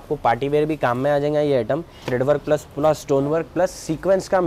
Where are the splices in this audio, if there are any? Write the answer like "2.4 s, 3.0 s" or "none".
2.0 s

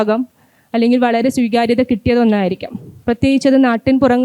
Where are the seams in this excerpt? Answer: none

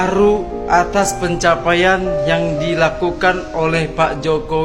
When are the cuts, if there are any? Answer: none

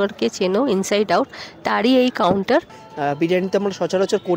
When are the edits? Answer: 2.8 s

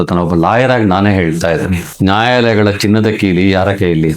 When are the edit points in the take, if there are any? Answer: 1.8 s

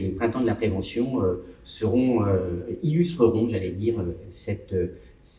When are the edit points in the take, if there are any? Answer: none

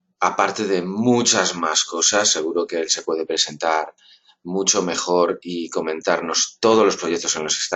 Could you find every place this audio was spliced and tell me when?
6.7 s

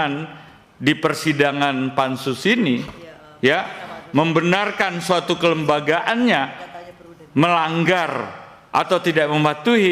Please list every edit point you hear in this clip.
none

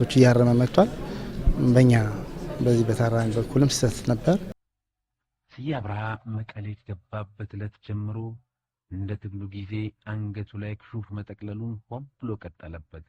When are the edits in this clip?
4.5 s

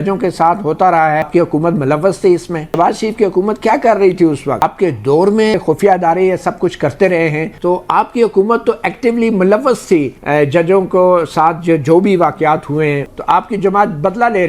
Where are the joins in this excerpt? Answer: 1.3 s, 2.7 s, 4.6 s, 5.5 s, 7.6 s, 13.1 s

